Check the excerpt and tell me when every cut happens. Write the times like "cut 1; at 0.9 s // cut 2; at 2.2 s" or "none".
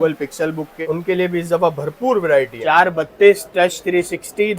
cut 1; at 0.8 s // cut 2; at 2.5 s